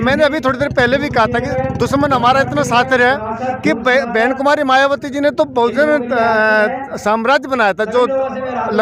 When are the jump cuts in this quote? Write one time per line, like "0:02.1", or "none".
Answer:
none